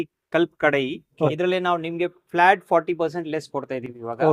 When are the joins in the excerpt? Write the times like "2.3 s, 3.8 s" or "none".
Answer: 1.3 s